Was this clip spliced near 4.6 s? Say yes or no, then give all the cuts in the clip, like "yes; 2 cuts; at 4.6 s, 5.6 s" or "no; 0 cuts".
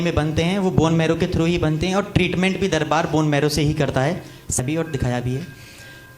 yes; 1 cut; at 4.6 s